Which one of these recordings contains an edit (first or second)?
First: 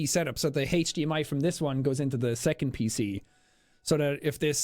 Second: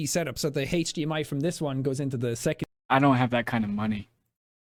first